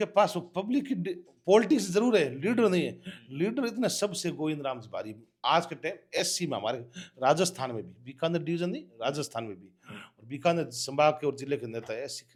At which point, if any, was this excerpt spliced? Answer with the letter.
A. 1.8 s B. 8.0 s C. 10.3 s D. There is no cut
D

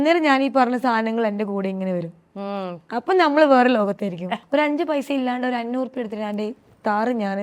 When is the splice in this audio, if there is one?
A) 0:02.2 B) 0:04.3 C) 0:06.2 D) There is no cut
B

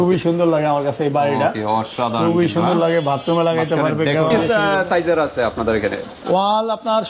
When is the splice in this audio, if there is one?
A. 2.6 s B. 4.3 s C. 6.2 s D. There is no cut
B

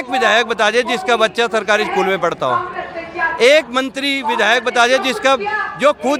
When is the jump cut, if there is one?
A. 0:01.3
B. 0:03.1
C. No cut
C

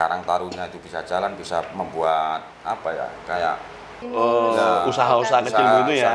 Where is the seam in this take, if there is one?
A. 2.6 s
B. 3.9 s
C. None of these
B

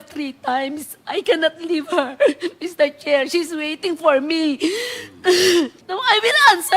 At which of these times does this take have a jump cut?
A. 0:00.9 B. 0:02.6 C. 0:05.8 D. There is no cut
C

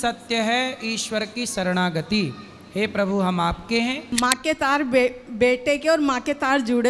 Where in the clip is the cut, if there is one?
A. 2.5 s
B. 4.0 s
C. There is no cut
B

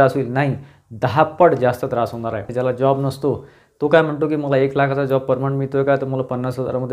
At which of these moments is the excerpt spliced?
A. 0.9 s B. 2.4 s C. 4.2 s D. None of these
B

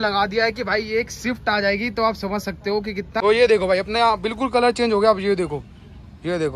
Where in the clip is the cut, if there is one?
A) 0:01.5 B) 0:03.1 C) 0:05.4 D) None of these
B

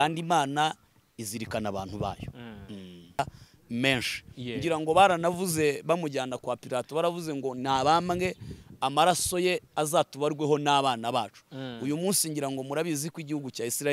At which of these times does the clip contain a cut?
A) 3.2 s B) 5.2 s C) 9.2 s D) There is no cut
A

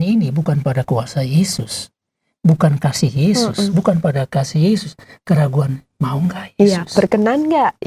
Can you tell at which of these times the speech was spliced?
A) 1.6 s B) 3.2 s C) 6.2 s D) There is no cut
D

